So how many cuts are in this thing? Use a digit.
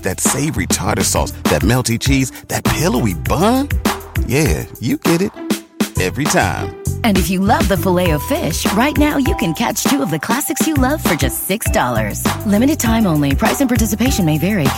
0